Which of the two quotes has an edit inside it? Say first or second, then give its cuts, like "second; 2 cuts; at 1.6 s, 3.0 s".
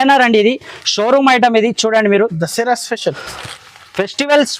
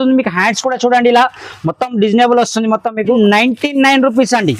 second; 1 cut; at 3.2 s